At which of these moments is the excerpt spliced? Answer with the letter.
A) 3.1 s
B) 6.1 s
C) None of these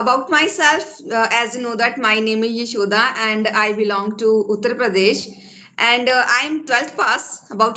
C